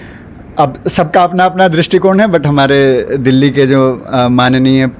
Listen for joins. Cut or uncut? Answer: uncut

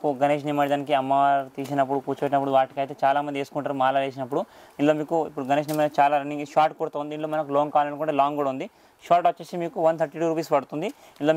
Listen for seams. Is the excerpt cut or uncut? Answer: uncut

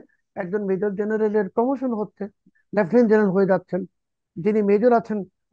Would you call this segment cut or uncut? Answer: uncut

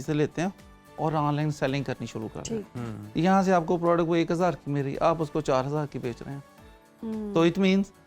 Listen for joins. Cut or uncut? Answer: uncut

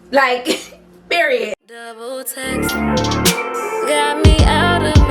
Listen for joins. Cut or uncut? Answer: cut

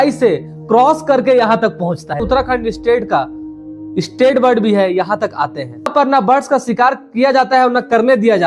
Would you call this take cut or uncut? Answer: cut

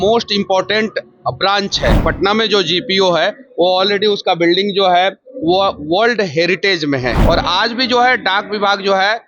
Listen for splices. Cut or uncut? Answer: cut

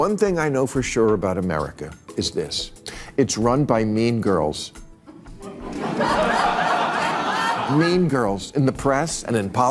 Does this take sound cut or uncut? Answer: uncut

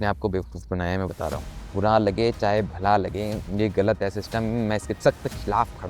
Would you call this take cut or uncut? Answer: cut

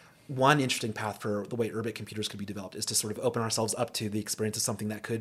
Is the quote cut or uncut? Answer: cut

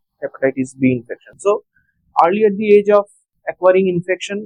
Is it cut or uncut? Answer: uncut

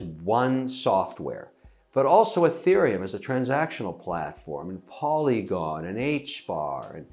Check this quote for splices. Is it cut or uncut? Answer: uncut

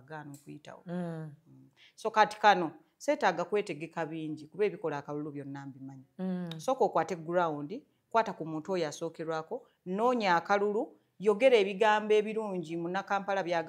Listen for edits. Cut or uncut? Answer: uncut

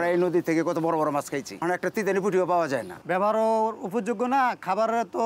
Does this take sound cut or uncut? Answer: cut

